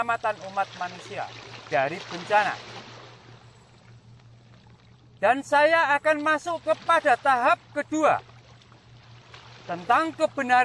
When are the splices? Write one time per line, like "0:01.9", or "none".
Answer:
0:02.9
0:05.2
0:08.4
0:09.7